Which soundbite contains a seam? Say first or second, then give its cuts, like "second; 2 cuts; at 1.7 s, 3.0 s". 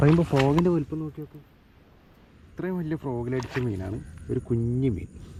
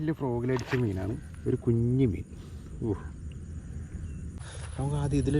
second; 1 cut; at 4.4 s